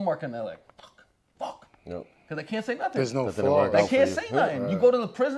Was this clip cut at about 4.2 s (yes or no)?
no